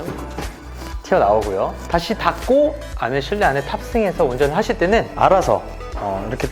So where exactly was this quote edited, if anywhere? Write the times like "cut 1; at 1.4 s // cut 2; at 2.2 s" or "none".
cut 1; at 5.1 s